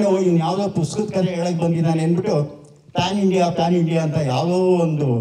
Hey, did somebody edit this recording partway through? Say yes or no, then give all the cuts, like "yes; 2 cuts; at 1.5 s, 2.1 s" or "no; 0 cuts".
no; 0 cuts